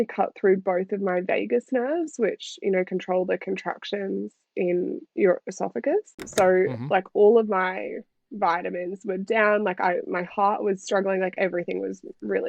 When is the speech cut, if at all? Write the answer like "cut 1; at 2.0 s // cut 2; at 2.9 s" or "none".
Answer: cut 1; at 6.2 s